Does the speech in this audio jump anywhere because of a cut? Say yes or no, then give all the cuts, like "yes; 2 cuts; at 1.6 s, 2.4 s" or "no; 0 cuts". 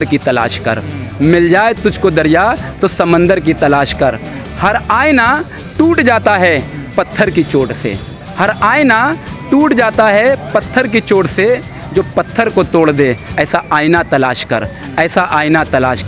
no; 0 cuts